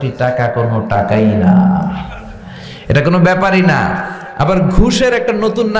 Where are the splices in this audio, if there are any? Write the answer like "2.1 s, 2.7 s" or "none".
none

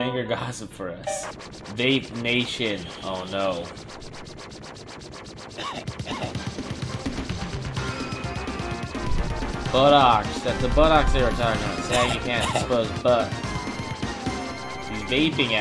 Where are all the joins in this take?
1.3 s

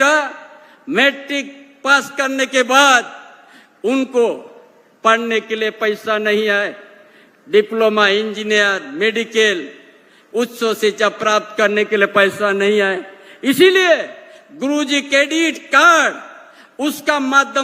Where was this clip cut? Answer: none

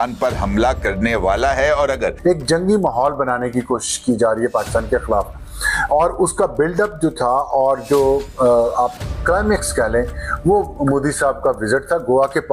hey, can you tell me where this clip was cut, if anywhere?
2.2 s

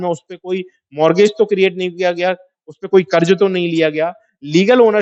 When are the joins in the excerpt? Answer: none

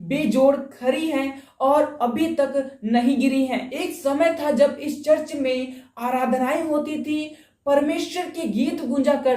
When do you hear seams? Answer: 3.7 s

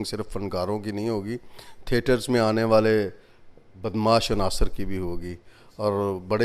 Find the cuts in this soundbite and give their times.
none

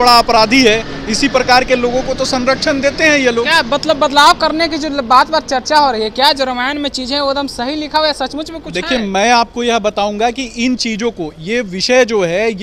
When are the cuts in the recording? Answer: none

